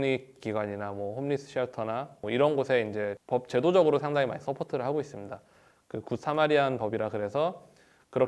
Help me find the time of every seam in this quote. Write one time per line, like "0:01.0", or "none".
0:03.2